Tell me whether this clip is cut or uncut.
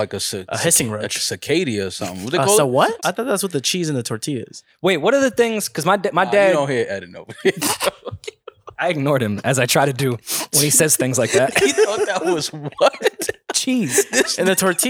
cut